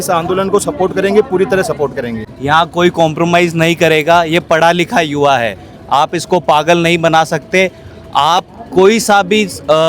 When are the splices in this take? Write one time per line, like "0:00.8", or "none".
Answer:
0:02.3